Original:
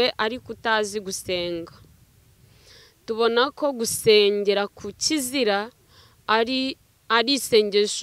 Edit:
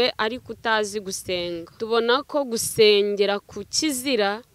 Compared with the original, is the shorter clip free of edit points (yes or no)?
no